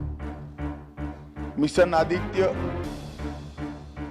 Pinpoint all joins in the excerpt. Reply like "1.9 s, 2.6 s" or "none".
1.5 s, 2.5 s